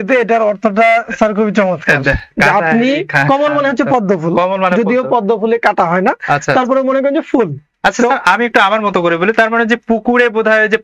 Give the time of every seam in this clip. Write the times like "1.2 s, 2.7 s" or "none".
none